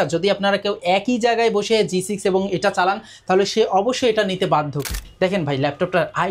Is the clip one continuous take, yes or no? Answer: no